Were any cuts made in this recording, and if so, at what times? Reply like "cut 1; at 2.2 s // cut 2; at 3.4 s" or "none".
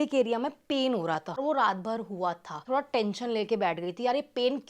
cut 1; at 1.3 s // cut 2; at 2.6 s